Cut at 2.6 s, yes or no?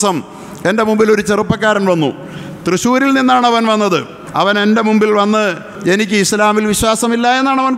no